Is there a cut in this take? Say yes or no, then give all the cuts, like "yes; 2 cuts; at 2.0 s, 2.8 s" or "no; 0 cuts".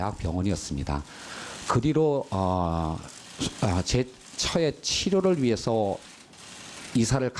yes; 1 cut; at 3.0 s